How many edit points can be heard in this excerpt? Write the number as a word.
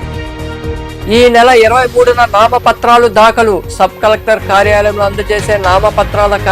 one